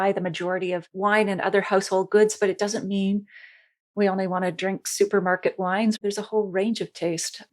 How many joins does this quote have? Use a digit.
2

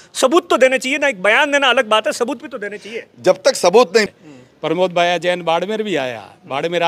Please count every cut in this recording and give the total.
1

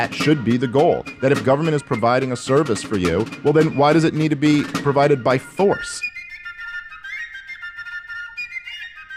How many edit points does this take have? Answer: 0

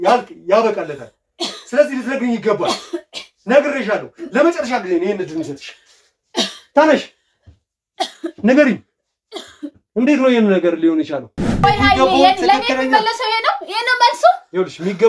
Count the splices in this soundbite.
1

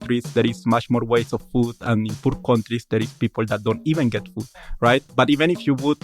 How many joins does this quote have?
1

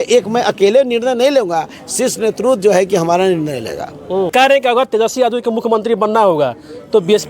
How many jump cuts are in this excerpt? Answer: 1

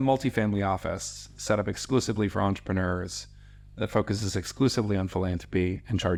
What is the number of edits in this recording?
0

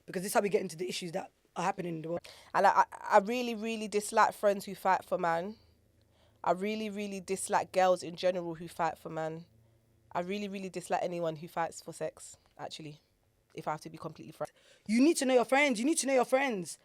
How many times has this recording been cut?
2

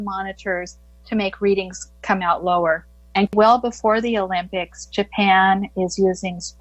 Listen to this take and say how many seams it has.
1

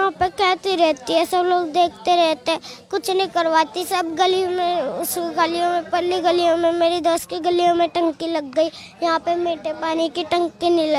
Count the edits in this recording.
0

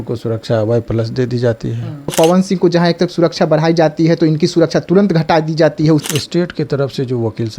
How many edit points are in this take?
2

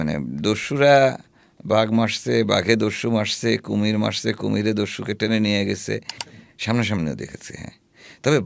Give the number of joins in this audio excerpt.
1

